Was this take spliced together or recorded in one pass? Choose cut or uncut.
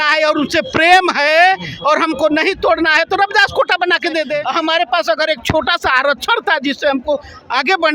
cut